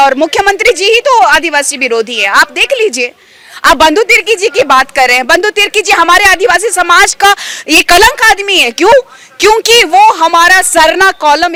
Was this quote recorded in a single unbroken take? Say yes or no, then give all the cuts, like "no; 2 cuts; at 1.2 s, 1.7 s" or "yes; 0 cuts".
yes; 0 cuts